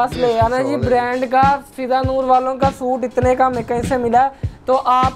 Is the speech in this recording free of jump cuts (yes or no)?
yes